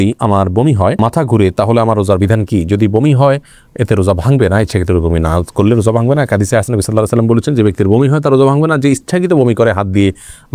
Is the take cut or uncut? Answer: uncut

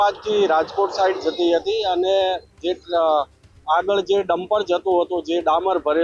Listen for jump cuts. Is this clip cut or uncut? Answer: uncut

